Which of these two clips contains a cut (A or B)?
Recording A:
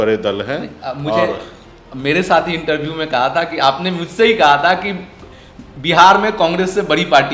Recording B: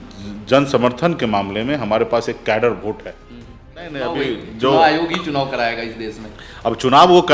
B